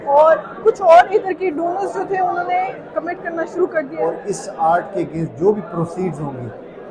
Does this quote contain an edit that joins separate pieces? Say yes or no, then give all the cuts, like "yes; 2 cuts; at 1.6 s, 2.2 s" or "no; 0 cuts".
yes; 1 cut; at 3.9 s